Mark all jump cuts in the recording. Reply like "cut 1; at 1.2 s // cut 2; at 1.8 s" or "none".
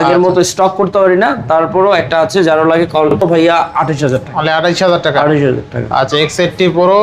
cut 1; at 3.2 s